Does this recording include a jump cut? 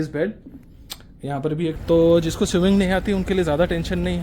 yes; 1 cut; at 1.7 s

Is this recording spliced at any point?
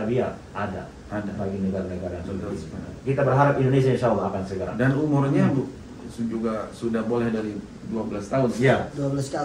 no; 0 cuts

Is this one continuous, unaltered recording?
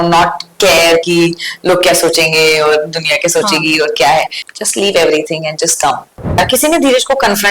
no; 2 cuts; at 4.4 s, 6.4 s

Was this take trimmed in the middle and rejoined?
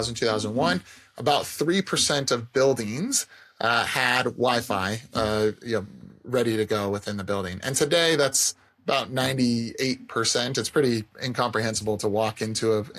no; 0 cuts

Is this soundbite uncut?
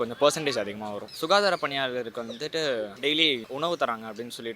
no; 2 cuts; at 1.1 s, 3.1 s

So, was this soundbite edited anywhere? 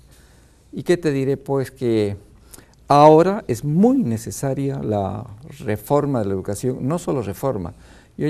no; 0 cuts

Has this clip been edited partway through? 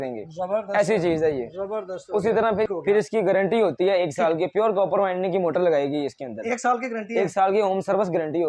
yes; 1 cut; at 2.7 s

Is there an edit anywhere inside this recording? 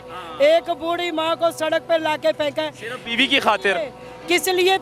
no; 0 cuts

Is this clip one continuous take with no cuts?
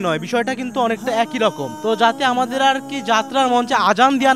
yes; 0 cuts

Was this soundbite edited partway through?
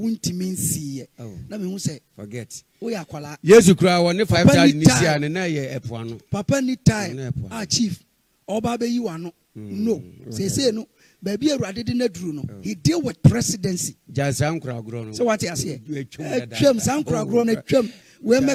no; 0 cuts

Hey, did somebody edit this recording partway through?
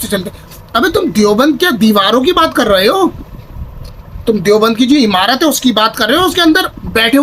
no; 0 cuts

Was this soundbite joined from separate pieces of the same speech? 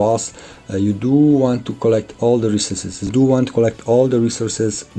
yes; 1 cut; at 3.1 s

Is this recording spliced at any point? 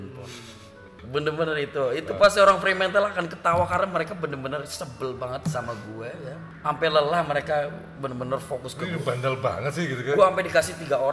yes; 2 cuts; at 1.0 s, 6.5 s

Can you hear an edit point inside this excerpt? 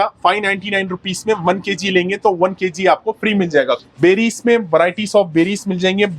yes; 1 cut; at 3.9 s

